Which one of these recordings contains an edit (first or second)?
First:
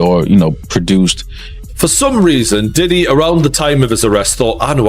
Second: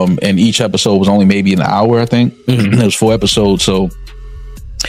first